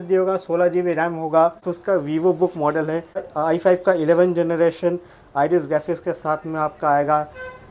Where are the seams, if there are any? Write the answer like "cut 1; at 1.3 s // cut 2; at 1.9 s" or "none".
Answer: cut 1; at 1.7 s // cut 2; at 3.3 s